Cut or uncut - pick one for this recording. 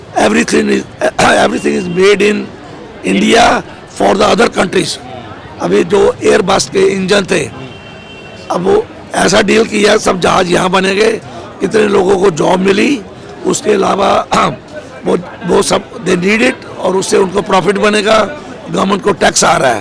uncut